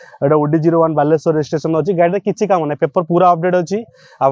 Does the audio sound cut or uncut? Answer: uncut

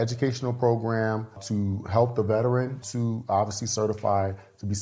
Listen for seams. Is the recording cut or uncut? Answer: cut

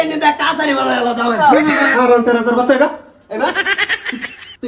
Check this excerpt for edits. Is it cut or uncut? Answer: cut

